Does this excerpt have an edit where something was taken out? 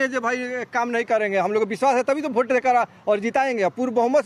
no; 0 cuts

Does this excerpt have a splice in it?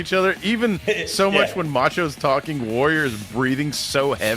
no; 0 cuts

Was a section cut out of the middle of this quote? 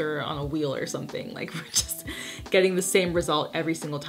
no; 0 cuts

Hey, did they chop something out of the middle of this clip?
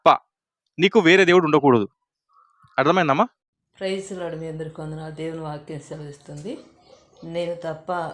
no; 0 cuts

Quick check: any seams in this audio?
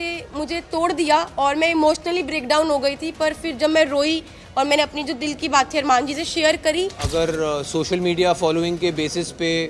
yes; 1 cut; at 7.0 s

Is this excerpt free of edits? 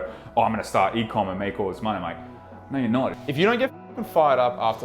no; 1 cut; at 3.2 s

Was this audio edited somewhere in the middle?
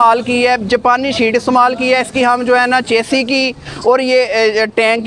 no; 0 cuts

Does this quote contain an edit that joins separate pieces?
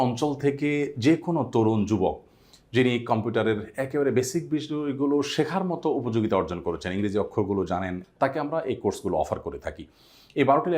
yes; 1 cut; at 8.0 s

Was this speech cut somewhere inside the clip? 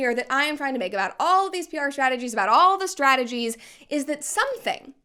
no; 0 cuts

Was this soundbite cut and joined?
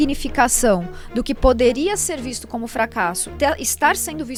no; 0 cuts

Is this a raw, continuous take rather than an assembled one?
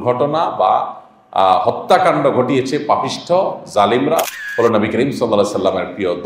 no; 1 cut; at 4.4 s

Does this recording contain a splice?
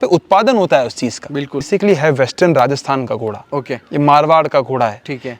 yes; 1 cut; at 1.6 s

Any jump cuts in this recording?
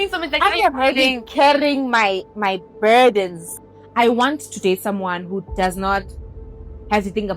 yes; 1 cut; at 3.4 s

